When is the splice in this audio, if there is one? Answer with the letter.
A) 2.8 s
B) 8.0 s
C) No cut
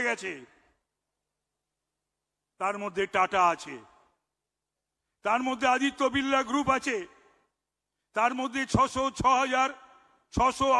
C